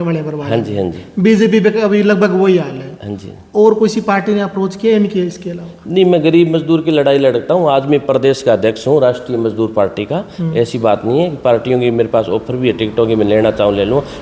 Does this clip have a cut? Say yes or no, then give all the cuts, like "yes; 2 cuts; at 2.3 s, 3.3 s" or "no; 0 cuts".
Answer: no; 0 cuts